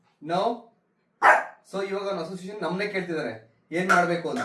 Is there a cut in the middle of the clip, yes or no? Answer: no